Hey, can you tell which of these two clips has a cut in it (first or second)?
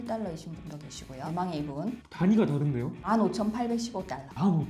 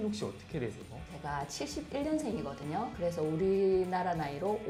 first